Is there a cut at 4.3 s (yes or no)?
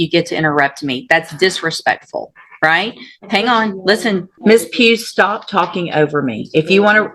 yes